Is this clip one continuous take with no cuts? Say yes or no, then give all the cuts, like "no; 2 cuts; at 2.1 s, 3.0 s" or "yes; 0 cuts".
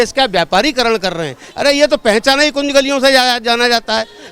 no; 1 cut; at 1.4 s